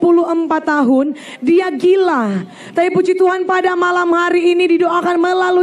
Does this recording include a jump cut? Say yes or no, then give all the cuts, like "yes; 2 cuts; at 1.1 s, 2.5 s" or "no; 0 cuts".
no; 0 cuts